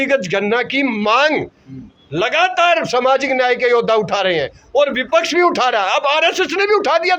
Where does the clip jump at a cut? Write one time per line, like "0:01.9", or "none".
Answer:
none

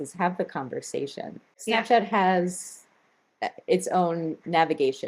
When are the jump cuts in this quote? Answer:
0:01.5

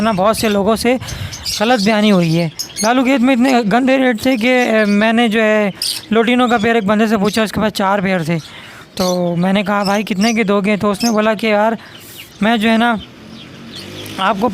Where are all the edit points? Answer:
0:02.6

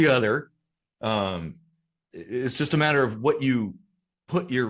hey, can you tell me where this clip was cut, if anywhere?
none

